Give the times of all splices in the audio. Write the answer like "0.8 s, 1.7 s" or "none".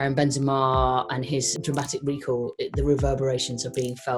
1.5 s

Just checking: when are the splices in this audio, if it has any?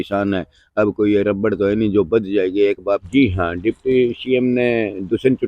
3.0 s

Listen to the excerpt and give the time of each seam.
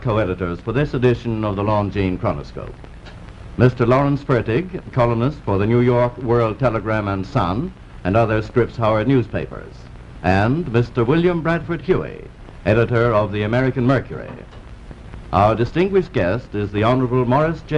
15.4 s

